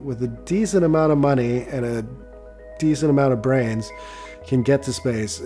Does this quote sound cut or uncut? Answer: uncut